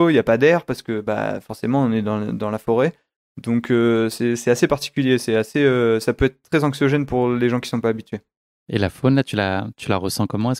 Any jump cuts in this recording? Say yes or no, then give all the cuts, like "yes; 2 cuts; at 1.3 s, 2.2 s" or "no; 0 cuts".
no; 0 cuts